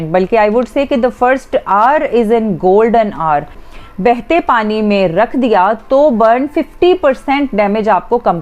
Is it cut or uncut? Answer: cut